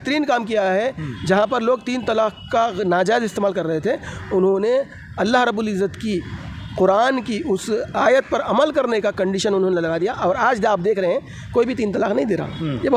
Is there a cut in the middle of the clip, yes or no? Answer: no